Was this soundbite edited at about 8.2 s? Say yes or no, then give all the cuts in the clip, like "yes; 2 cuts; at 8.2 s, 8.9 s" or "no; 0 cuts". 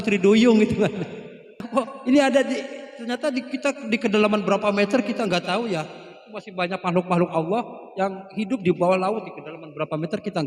no; 1 cut; at 1.6 s